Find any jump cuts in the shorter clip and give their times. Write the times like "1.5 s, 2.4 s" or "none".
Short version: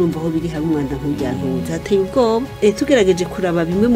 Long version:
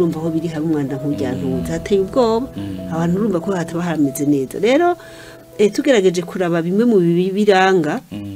2.5 s